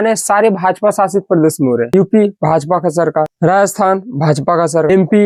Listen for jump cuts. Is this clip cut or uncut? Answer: uncut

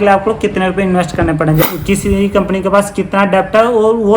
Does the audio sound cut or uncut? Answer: cut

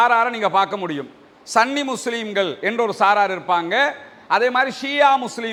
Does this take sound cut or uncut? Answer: uncut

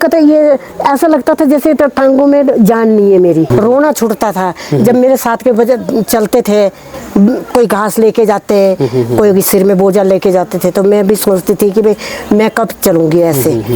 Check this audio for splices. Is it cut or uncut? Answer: uncut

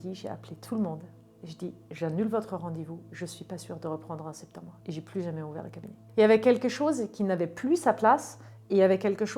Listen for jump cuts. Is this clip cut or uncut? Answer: uncut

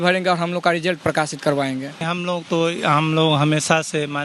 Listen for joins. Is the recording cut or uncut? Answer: cut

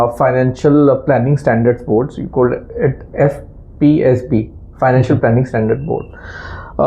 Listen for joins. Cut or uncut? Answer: uncut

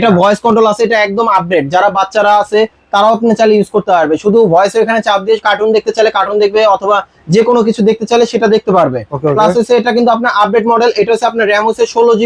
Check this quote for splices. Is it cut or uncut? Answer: uncut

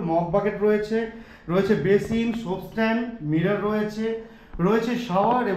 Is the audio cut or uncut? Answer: uncut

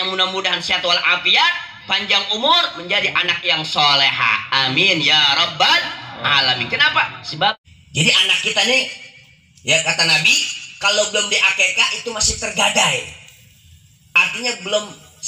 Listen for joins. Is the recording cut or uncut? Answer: cut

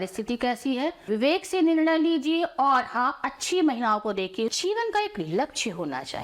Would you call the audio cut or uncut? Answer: cut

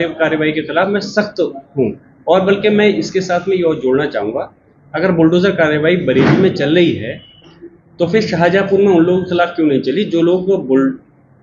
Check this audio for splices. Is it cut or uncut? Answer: uncut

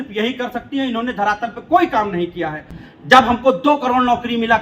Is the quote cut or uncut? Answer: cut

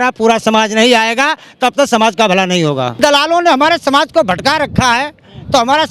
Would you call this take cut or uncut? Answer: cut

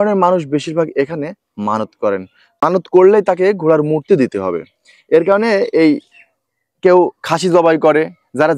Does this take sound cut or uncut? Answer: cut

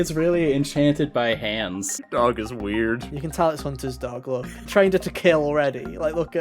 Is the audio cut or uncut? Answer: cut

